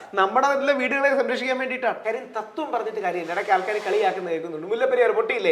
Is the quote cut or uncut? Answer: cut